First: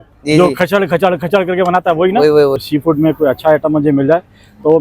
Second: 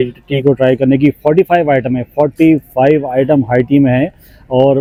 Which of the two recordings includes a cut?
first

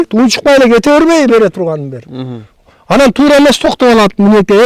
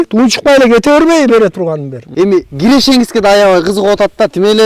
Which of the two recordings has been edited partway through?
second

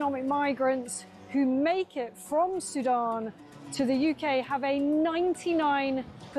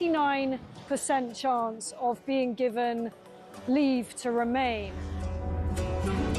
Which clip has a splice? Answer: second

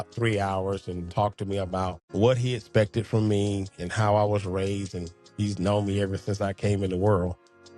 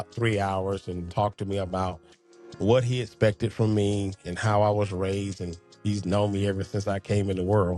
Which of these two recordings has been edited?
first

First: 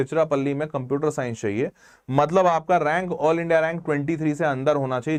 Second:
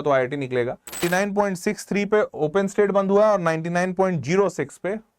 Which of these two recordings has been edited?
second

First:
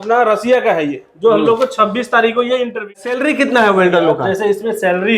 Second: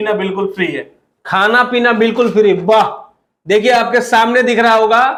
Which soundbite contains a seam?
first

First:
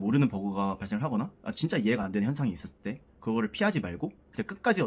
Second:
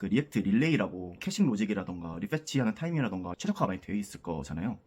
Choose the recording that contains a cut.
second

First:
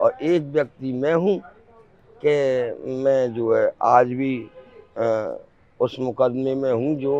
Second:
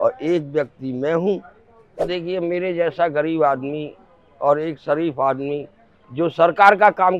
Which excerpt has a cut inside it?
second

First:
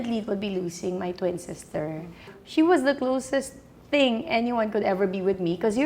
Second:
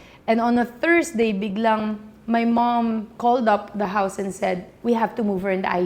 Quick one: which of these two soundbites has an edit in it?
first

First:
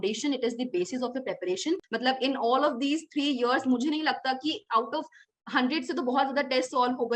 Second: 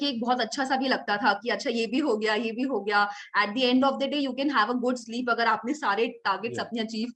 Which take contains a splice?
first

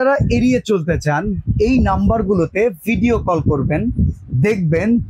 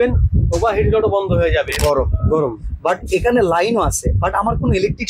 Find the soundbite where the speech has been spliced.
second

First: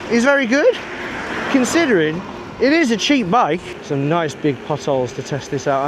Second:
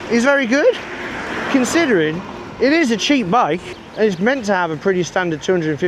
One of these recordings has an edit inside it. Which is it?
first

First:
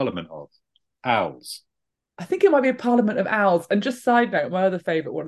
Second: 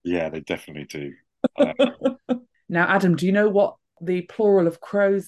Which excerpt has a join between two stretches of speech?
second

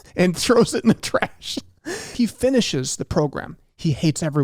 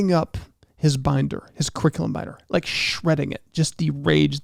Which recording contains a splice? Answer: first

